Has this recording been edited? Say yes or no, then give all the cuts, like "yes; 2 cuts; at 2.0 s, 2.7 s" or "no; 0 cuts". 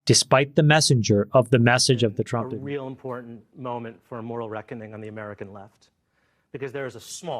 yes; 1 cut; at 2.2 s